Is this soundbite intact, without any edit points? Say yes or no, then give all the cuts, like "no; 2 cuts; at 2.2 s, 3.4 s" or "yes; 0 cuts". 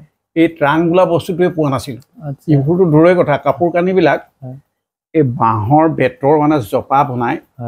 yes; 0 cuts